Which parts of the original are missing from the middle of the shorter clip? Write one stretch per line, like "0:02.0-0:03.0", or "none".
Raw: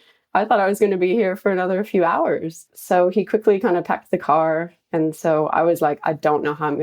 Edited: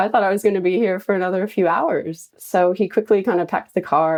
none